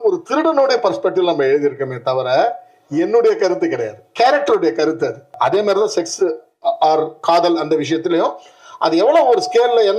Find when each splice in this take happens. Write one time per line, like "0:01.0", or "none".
0:05.3